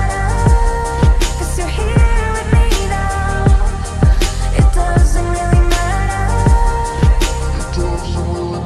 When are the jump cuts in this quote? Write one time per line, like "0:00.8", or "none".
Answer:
none